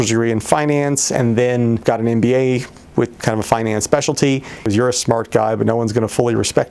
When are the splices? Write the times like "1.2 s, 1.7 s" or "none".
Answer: 1.8 s, 4.7 s

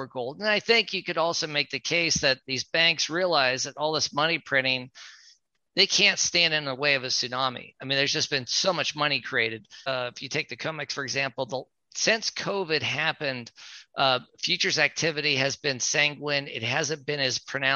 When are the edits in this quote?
9.7 s

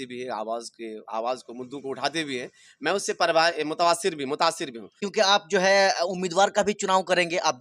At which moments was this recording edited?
5.0 s

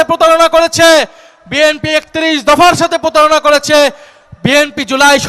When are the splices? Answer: none

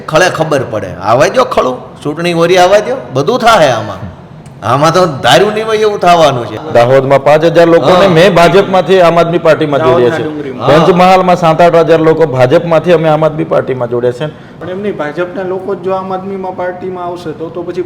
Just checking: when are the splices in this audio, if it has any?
6.5 s, 14.6 s

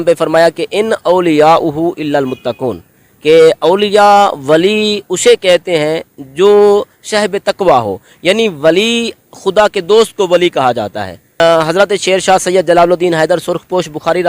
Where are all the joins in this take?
11.4 s

